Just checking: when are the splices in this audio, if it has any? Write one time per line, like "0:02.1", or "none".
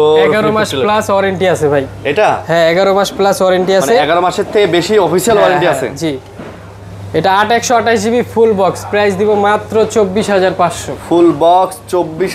none